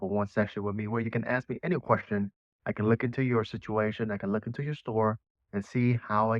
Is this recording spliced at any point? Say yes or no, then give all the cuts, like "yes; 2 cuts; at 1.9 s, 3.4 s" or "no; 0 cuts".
yes; 1 cut; at 5.4 s